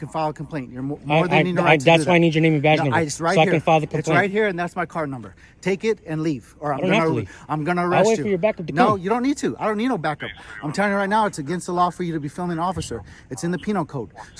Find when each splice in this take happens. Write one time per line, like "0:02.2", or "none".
none